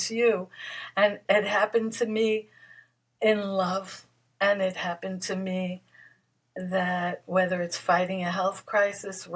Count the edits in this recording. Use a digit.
1